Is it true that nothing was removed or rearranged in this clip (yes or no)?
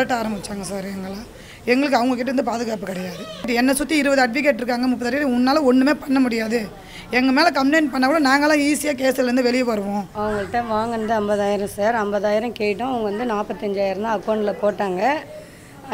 no